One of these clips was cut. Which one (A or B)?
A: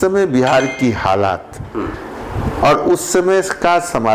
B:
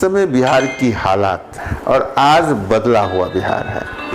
B